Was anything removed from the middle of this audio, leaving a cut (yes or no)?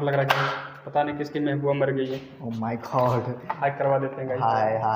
no